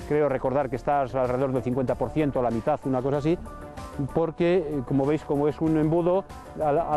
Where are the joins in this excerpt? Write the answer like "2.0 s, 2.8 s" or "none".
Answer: none